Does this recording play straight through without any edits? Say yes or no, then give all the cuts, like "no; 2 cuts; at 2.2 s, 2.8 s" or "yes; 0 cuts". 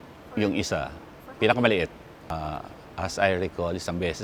yes; 0 cuts